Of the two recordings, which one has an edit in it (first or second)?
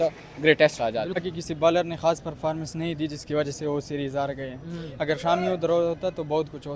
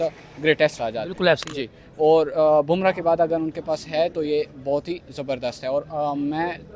first